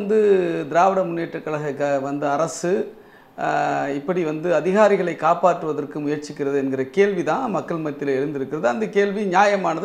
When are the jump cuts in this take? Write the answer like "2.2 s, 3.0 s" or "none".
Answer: none